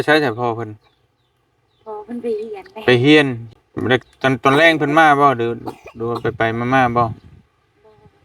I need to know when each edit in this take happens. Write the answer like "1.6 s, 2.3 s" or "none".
3.4 s